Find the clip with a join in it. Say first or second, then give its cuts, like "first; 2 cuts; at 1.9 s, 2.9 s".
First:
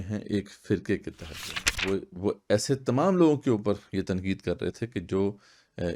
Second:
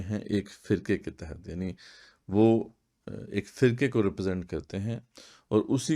first; 1 cut; at 1.7 s